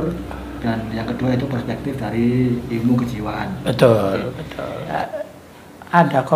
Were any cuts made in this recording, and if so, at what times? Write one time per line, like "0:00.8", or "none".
0:05.0